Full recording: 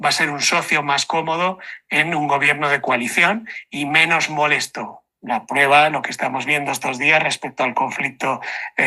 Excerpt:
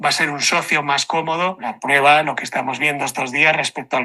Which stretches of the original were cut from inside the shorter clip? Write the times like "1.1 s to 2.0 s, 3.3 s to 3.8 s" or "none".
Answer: 1.7 s to 5.3 s